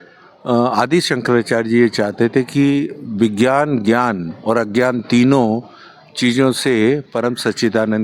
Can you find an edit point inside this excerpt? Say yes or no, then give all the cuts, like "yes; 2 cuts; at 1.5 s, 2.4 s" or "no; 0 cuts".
no; 0 cuts